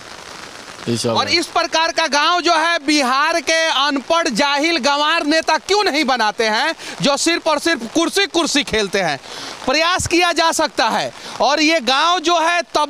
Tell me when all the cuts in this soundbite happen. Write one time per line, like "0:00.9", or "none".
none